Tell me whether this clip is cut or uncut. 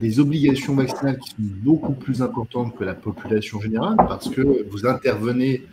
uncut